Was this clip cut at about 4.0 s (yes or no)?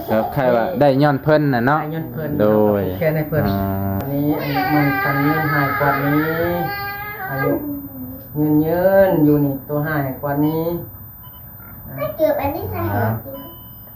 yes